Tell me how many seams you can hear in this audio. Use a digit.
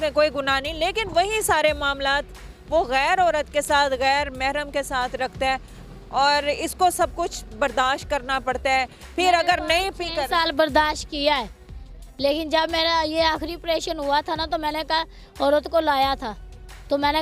0